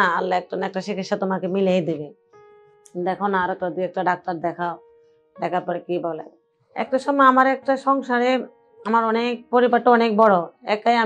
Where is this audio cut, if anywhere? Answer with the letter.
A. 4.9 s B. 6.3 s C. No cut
B